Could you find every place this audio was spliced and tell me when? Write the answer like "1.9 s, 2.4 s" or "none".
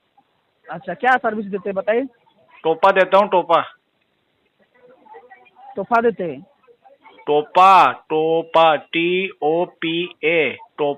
none